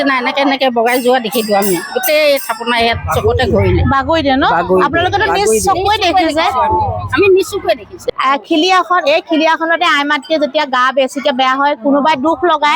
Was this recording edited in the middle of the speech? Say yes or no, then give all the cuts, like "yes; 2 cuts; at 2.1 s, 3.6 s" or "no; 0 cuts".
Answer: yes; 1 cut; at 7.9 s